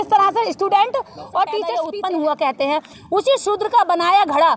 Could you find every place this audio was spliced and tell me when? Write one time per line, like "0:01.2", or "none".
0:01.8